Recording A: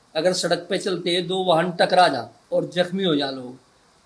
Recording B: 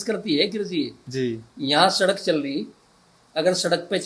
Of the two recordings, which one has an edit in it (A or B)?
A